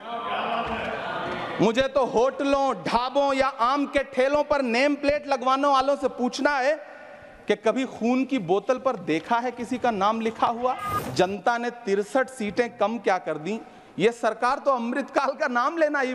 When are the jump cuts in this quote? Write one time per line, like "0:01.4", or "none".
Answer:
0:10.9